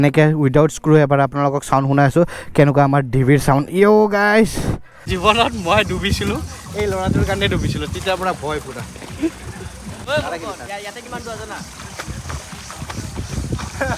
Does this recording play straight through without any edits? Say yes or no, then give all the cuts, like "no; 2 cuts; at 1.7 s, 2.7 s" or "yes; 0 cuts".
no; 2 cuts; at 5.1 s, 10.0 s